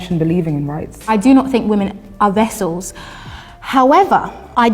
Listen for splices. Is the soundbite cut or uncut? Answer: uncut